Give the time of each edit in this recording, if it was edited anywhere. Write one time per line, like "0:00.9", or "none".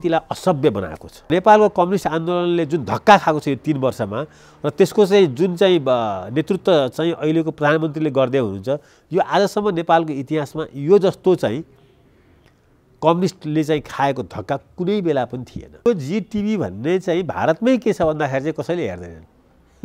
0:01.3
0:15.8